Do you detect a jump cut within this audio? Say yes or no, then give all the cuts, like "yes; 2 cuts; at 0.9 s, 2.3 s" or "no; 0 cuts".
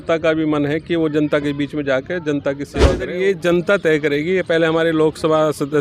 yes; 1 cut; at 3.0 s